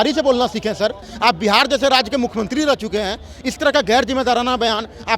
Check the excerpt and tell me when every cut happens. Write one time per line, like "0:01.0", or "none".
0:01.1